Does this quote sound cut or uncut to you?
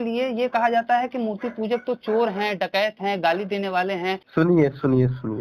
cut